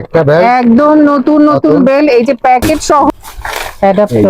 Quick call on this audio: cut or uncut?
cut